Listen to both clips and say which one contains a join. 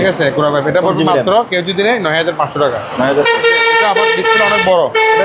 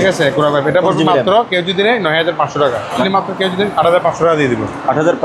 second; 1 cut; at 3.0 s

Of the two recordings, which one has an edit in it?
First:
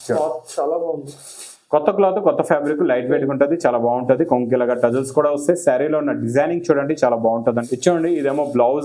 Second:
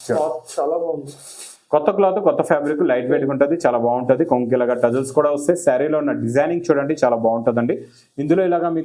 first; 1 cut; at 7.6 s

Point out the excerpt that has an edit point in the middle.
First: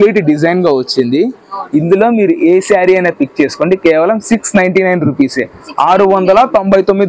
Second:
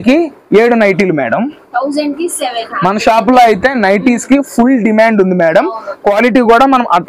second; 1 cut; at 2.7 s

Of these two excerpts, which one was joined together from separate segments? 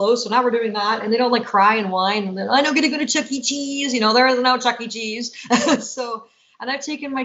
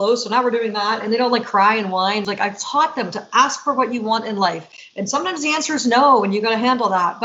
second; 1 cut; at 2.3 s

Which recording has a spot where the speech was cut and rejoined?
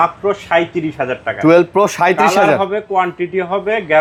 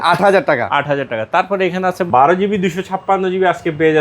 second; 1 cut; at 2.0 s

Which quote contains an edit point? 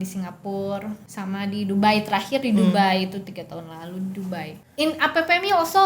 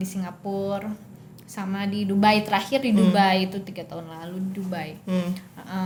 first; 2 cuts; at 1.1 s, 4.5 s

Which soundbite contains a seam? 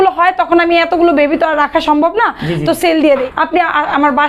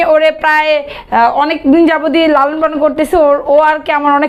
first; 1 cut; at 3.3 s

